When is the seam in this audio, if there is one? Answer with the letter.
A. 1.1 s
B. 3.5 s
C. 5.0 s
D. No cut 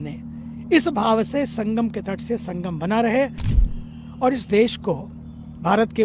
B